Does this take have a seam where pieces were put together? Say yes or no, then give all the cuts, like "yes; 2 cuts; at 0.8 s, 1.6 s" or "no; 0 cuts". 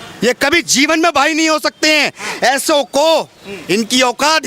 no; 0 cuts